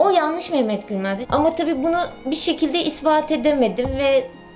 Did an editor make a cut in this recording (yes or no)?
yes